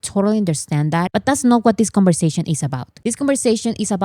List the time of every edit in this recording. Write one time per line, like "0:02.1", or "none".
0:01.1